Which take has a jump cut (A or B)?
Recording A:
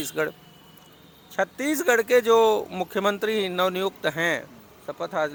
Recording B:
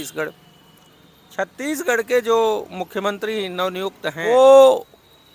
B